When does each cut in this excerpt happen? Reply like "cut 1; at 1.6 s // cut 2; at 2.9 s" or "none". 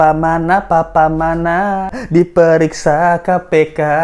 cut 1; at 2.0 s

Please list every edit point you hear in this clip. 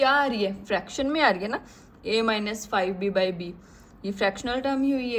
none

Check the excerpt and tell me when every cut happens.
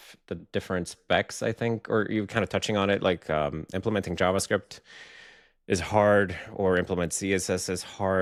none

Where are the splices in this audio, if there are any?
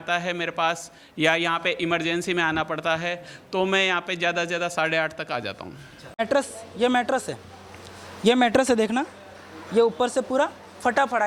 cut 1; at 6.2 s

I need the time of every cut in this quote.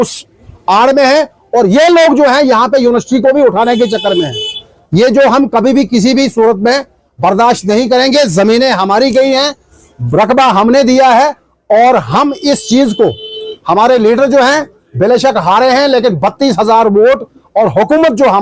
none

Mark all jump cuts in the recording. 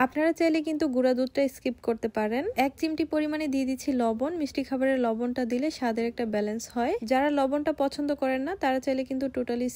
cut 1; at 2.5 s

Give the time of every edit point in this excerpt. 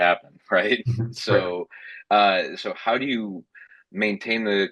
none

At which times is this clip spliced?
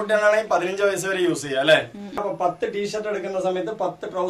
cut 1; at 2.2 s

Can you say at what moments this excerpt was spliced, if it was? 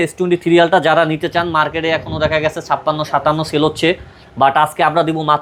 none

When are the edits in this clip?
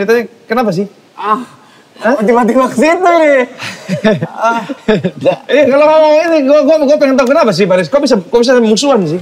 none

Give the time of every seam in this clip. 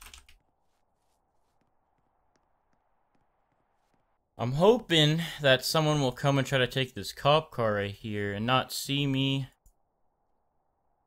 cut 1; at 3.7 s // cut 2; at 9.6 s

